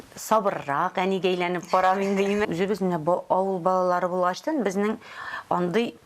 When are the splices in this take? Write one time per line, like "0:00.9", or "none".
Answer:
0:02.5